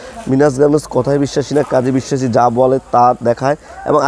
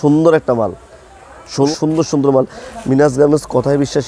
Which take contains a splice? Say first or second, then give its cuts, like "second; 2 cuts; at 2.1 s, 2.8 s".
second; 1 cut; at 1.7 s